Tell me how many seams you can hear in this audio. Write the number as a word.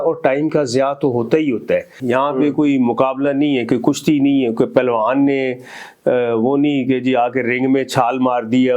one